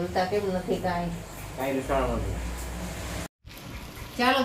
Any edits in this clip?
yes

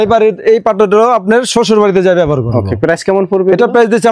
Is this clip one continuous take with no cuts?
yes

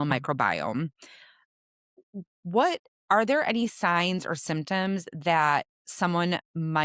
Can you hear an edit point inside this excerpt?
yes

